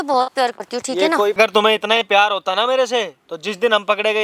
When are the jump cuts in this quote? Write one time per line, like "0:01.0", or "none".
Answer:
0:01.4